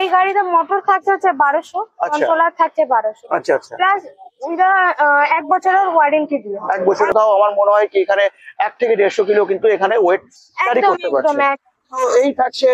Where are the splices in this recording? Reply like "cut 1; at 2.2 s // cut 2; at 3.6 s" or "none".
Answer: cut 1; at 7.1 s